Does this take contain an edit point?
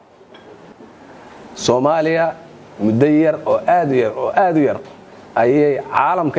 no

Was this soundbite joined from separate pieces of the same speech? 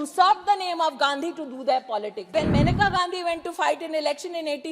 yes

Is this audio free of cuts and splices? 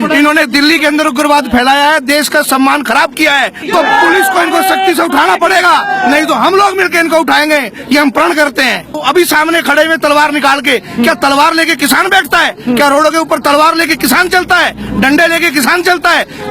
no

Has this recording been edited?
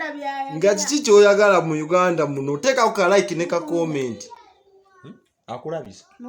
no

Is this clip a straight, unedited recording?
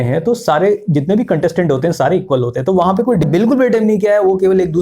no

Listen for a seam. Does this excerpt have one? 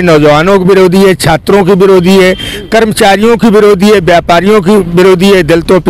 no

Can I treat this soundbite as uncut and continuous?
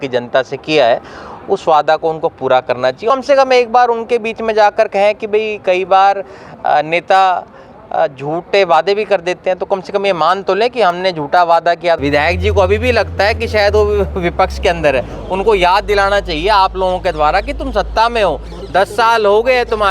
no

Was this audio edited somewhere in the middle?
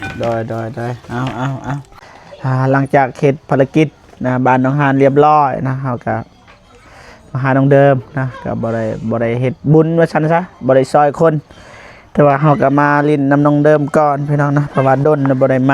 yes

